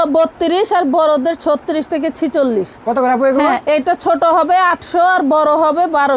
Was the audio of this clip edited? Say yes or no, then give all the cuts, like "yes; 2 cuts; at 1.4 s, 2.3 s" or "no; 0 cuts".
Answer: no; 0 cuts